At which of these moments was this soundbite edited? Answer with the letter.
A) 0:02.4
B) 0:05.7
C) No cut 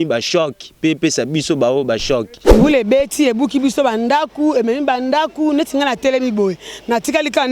A